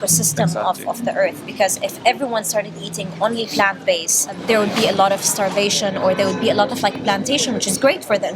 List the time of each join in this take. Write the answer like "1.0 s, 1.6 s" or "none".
4.3 s

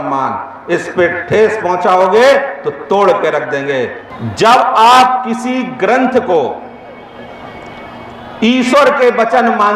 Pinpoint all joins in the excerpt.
4.0 s

